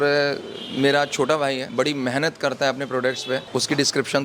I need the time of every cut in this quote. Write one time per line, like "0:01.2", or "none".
0:01.7
0:03.5